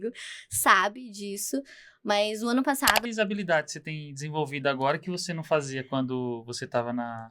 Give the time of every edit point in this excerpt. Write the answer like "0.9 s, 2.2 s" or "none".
3.1 s